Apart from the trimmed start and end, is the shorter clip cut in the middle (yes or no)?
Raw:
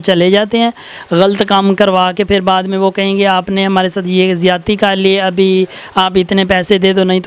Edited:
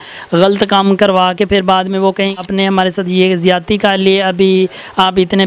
yes